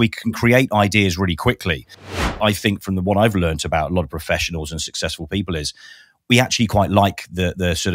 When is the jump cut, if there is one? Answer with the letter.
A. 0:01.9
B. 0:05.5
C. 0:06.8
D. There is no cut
A